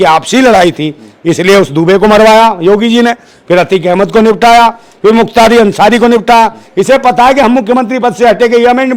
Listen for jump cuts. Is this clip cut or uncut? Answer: uncut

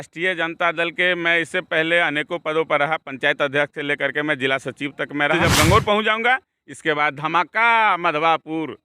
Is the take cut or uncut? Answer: cut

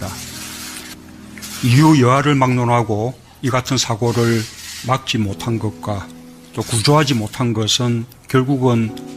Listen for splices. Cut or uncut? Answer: cut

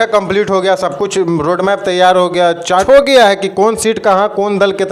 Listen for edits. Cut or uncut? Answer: cut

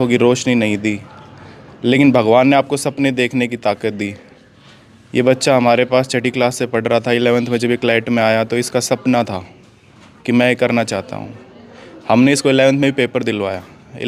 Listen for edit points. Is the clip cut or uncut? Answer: uncut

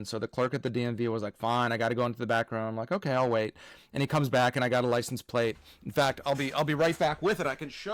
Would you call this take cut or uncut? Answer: uncut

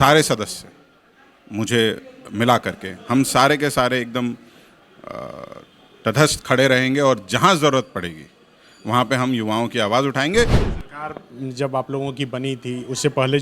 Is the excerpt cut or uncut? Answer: cut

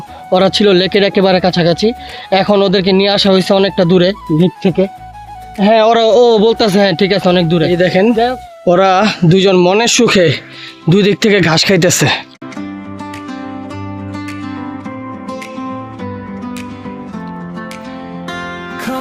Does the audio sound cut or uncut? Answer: uncut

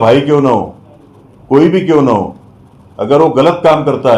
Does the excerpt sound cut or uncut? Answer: uncut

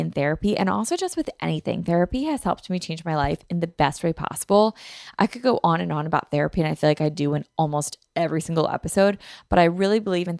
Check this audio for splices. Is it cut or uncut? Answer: uncut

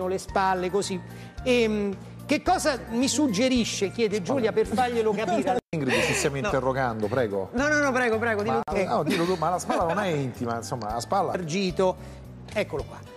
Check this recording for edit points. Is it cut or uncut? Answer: uncut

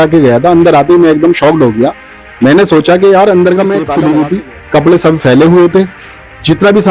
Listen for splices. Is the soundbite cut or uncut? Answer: cut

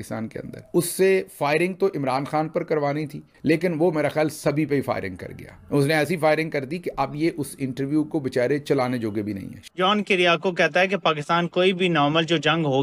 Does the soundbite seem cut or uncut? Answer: cut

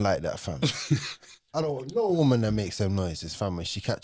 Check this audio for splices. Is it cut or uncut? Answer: uncut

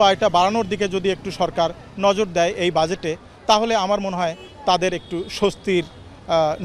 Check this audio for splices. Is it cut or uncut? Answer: uncut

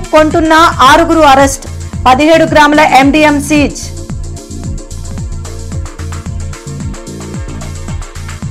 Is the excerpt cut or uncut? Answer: uncut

